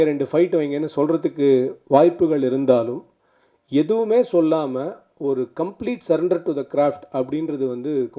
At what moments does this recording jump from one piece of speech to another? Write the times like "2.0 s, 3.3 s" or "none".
none